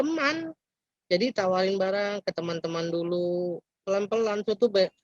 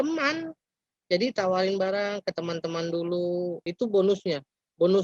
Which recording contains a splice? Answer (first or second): second